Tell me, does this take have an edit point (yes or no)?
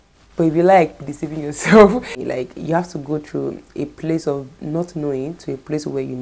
yes